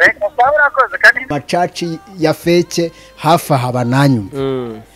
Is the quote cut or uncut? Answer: cut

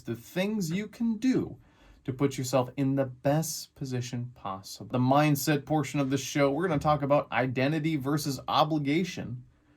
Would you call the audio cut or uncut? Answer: cut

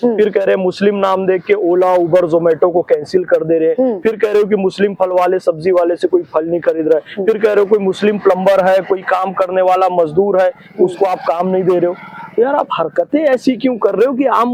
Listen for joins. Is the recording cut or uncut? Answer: uncut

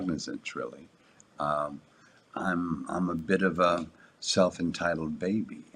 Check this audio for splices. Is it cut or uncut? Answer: uncut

